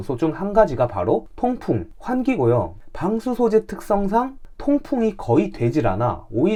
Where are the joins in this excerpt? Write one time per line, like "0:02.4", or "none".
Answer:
none